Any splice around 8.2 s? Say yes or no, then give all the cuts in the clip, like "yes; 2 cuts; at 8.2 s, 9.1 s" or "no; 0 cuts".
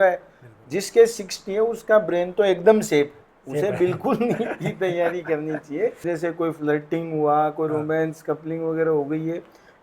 no; 1 cut; at 6.0 s